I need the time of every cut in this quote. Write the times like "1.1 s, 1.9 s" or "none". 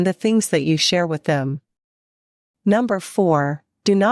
3.2 s